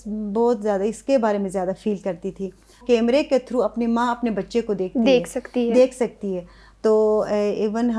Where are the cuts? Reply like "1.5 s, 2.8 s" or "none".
2.8 s